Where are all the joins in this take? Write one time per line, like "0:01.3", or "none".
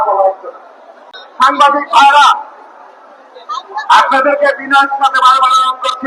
0:01.0